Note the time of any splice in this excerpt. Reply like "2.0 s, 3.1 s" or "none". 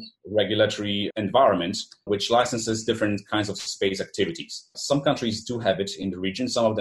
1.0 s, 2.0 s, 4.8 s